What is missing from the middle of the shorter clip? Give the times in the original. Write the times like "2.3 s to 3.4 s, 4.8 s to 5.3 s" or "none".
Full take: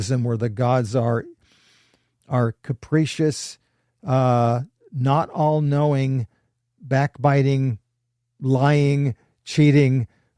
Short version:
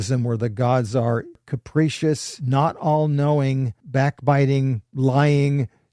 1.5 s to 2.7 s, 3.5 s to 4.9 s, 6.3 s to 6.7 s, 7.8 s to 8.3 s